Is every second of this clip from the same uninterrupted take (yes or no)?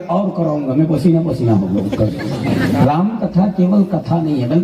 no